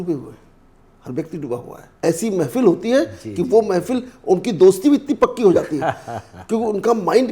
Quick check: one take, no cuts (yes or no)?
no